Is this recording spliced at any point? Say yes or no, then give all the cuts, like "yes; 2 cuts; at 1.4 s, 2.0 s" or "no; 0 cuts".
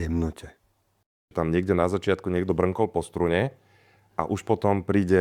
yes; 1 cut; at 1.3 s